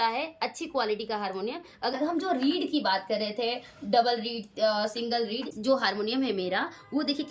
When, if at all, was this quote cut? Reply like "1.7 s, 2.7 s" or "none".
1.9 s, 5.5 s